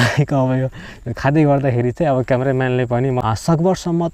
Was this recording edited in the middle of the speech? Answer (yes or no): yes